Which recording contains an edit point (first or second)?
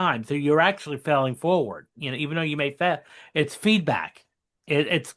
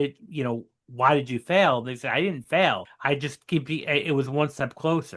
second